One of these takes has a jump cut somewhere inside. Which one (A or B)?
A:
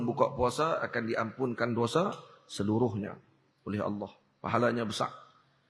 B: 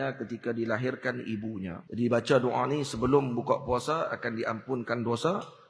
B